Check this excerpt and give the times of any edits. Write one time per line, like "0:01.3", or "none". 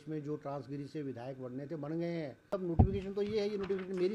0:02.7